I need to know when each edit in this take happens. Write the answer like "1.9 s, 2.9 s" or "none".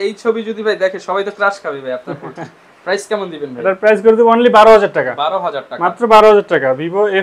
none